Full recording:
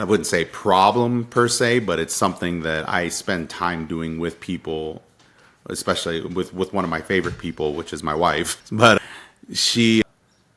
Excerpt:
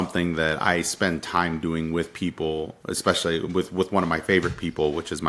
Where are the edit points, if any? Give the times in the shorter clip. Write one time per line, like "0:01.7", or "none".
0:02.8